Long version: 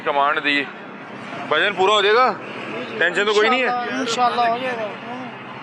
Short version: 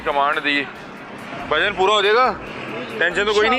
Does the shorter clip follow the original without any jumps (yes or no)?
yes